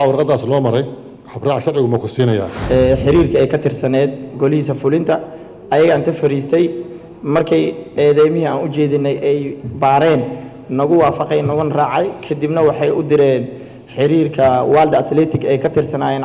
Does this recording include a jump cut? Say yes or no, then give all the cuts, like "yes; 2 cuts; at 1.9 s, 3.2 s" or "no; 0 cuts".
yes; 1 cut; at 2.5 s